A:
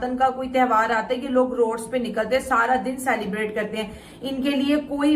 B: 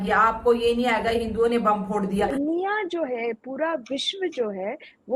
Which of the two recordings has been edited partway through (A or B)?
B